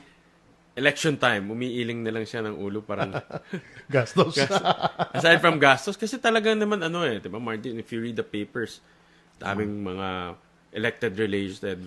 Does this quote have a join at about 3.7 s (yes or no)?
no